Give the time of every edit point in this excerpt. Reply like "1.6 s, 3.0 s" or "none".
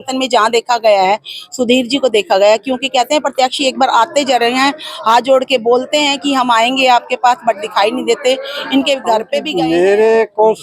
9.4 s